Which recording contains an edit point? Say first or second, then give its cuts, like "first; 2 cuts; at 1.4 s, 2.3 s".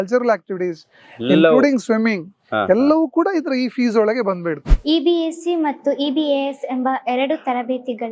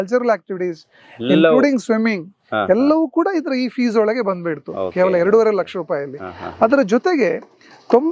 first; 1 cut; at 4.7 s